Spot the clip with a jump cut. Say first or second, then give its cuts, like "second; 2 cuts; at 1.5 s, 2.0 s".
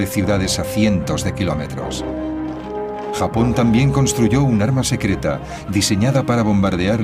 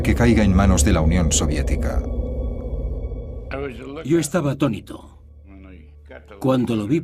first; 1 cut; at 1.4 s